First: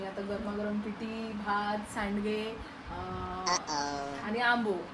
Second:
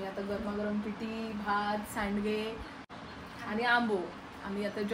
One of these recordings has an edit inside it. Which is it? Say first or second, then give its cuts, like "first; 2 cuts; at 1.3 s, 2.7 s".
second; 1 cut; at 3.3 s